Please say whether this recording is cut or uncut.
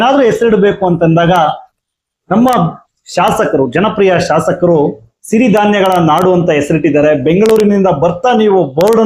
uncut